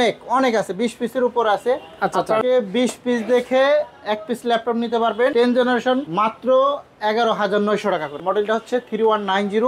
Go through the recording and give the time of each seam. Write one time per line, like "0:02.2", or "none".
0:02.4
0:05.3
0:06.1
0:08.2